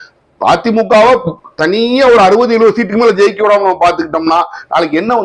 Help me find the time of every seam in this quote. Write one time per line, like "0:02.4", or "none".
none